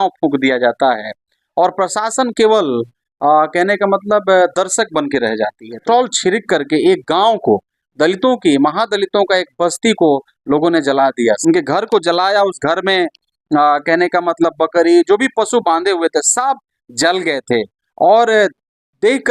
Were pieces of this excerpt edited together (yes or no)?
yes